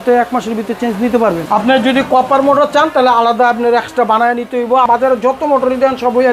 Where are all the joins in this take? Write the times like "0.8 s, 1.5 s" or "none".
1.4 s, 4.9 s